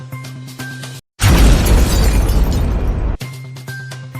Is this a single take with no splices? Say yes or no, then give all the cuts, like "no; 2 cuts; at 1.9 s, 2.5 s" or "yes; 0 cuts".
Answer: no; 1 cut; at 0.9 s